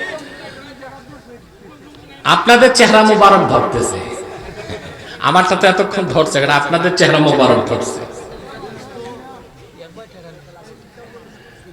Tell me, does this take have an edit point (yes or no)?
no